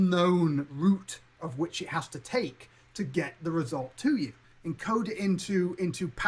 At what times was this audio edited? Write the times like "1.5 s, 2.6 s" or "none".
4.5 s

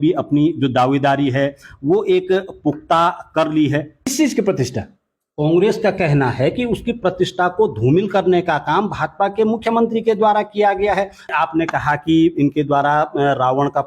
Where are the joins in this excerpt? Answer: 4.1 s, 11.3 s

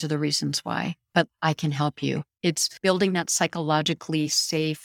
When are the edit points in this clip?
2.5 s

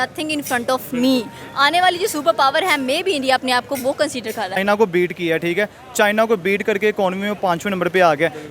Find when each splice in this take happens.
4.6 s

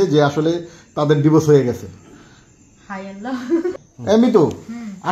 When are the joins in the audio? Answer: 4.1 s

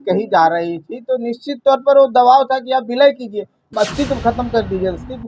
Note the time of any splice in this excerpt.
3.7 s

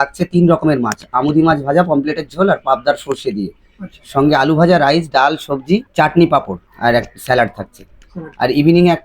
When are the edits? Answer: 5.9 s, 6.6 s

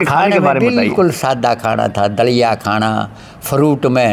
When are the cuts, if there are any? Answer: none

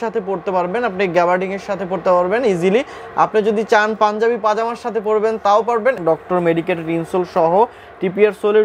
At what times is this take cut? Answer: 6.0 s

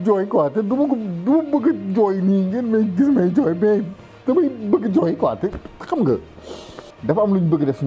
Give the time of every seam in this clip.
6.9 s

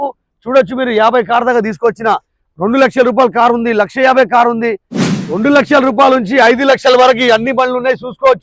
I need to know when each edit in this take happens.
5.3 s

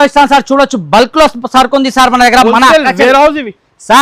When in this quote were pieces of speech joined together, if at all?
none

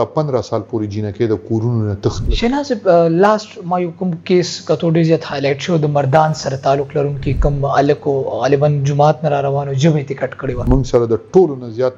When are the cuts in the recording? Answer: 2.3 s, 10.6 s

